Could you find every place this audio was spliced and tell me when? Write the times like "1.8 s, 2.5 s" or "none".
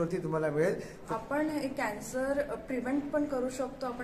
1.0 s